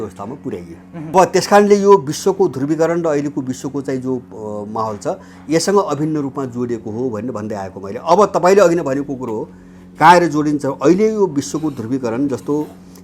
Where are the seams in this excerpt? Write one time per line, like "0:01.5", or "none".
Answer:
0:01.1